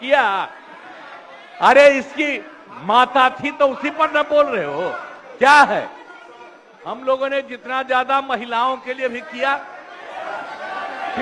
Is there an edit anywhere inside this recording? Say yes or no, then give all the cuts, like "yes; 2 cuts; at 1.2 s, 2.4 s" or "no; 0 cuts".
no; 0 cuts